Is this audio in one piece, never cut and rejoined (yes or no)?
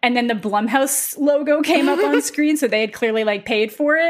yes